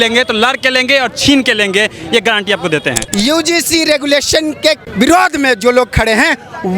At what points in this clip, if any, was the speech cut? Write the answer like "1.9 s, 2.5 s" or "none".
3.0 s, 4.9 s